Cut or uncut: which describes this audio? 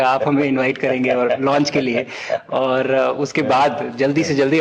uncut